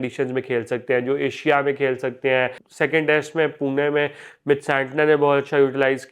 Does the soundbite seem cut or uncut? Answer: cut